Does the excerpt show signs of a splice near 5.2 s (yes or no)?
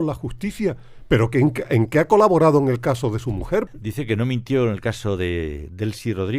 no